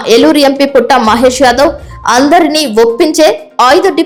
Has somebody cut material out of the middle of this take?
no; 0 cuts

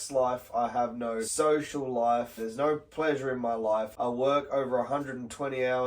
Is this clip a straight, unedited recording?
no; 3 cuts; at 1.3 s, 2.4 s, 3.9 s

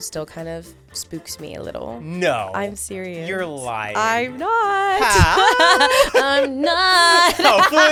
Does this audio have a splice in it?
no; 0 cuts

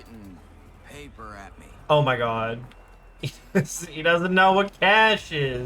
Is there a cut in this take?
no; 0 cuts

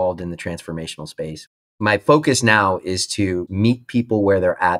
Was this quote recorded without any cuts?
no; 2 cuts; at 1.7 s, 3.4 s

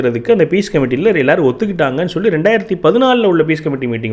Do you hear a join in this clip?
no; 0 cuts

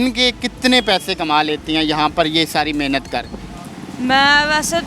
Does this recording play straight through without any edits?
yes; 0 cuts

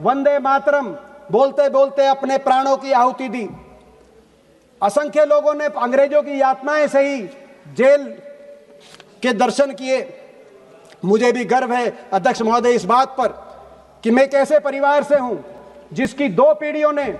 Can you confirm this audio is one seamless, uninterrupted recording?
yes; 0 cuts

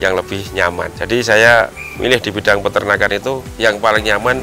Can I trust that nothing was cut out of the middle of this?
no; 2 cuts; at 1.0 s, 3.5 s

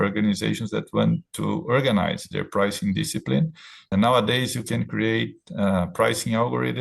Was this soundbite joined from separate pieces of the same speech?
yes; 1 cut; at 3.9 s

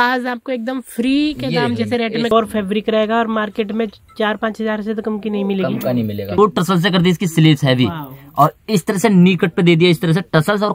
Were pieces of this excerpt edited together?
yes; 2 cuts; at 2.3 s, 6.3 s

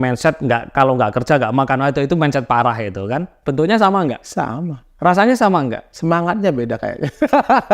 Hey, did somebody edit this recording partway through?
yes; 3 cuts; at 3.4 s, 4.2 s, 5.9 s

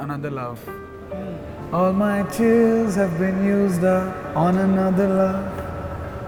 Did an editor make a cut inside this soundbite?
no; 0 cuts

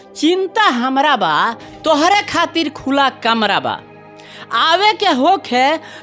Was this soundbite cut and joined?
no; 0 cuts

